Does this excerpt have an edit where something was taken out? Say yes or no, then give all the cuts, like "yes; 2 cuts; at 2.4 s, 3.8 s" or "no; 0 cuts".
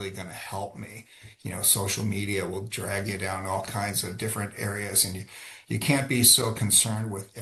no; 0 cuts